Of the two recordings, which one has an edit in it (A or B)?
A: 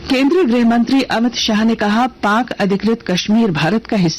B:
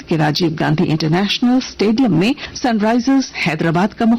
B